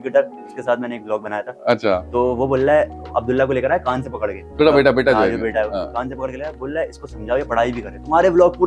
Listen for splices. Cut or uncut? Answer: uncut